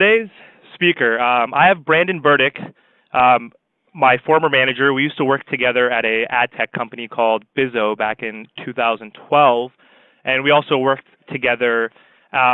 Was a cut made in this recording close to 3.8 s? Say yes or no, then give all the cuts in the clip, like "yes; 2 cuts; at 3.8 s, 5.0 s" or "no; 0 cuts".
yes; 1 cut; at 3.8 s